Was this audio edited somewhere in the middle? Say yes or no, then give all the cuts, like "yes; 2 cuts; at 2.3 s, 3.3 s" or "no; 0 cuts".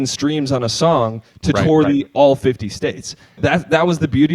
yes; 1 cut; at 3.4 s